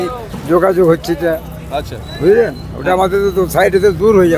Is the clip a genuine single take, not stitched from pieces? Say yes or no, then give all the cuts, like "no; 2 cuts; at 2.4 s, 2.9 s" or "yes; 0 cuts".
yes; 0 cuts